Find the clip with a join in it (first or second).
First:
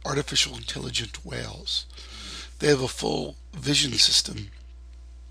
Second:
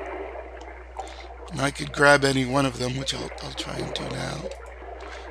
second